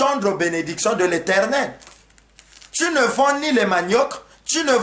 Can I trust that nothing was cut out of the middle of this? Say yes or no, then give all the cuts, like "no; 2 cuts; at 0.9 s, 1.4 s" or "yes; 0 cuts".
yes; 0 cuts